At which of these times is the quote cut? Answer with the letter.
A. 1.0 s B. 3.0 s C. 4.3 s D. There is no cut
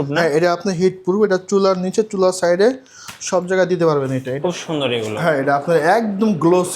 C